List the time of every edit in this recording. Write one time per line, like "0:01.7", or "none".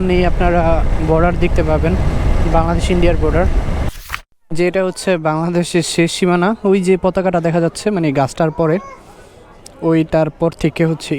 0:03.9